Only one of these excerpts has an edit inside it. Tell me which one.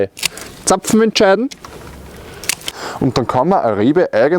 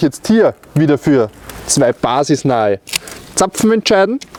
first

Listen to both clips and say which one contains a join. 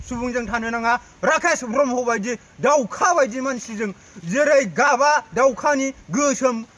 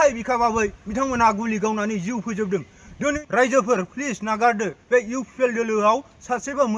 second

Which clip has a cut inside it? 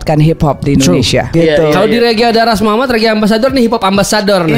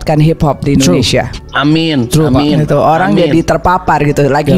first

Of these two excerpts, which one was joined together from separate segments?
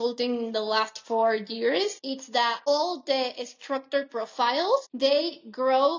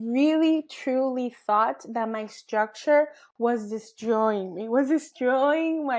first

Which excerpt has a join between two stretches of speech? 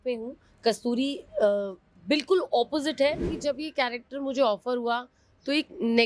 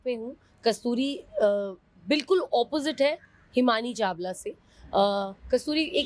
first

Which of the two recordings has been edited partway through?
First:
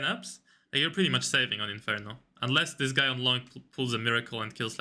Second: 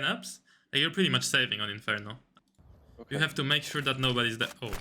second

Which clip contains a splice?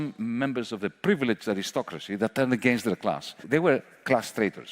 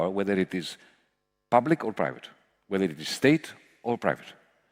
first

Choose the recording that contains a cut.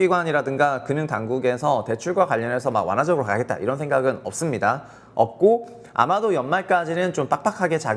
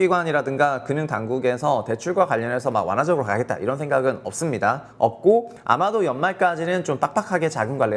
second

